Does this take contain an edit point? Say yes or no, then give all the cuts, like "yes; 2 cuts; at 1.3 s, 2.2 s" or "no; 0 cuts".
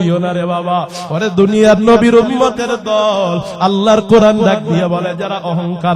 no; 0 cuts